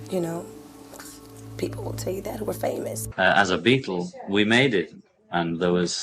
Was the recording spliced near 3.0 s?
yes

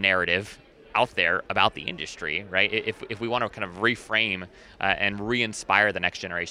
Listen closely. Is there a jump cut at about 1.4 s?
yes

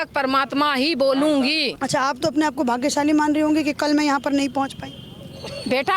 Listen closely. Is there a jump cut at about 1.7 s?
yes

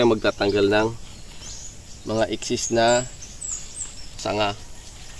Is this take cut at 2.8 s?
no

